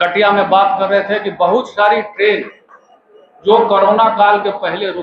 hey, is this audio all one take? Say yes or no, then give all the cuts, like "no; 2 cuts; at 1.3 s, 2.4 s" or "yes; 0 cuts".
yes; 0 cuts